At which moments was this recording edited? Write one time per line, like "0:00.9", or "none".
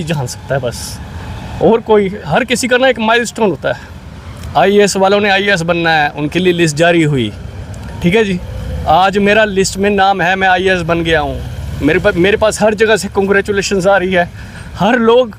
none